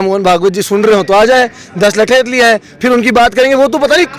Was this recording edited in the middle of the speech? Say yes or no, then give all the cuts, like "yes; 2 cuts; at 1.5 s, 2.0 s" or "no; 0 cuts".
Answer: no; 0 cuts